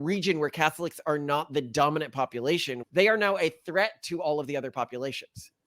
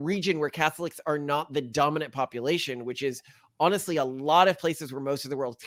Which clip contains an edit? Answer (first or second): first